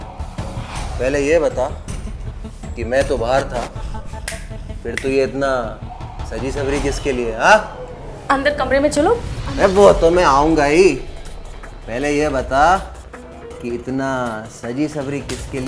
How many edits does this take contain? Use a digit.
0